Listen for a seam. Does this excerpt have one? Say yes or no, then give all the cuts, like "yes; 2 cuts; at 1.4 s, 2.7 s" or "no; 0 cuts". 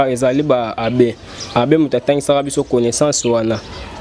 no; 0 cuts